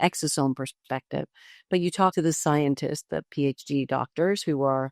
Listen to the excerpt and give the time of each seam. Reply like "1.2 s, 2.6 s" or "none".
2.1 s